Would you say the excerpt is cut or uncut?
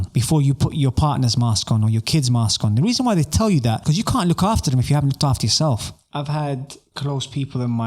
cut